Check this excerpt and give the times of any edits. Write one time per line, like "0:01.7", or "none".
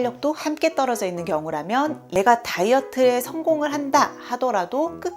0:02.0